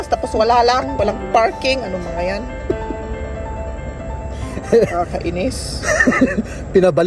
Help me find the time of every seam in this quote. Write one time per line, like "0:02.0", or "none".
none